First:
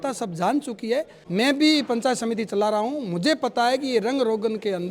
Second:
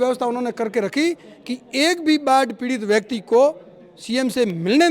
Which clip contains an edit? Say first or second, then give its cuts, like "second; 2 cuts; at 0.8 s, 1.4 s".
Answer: first; 1 cut; at 1.2 s